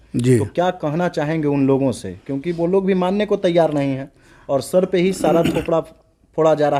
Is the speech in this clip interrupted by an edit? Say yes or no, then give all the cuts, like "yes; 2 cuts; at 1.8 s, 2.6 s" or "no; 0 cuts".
no; 0 cuts